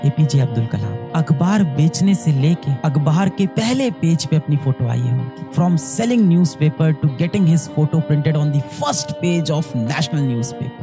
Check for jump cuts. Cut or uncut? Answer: uncut